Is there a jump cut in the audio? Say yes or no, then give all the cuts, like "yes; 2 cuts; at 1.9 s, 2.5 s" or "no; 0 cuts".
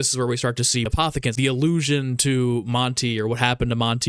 yes; 1 cut; at 0.9 s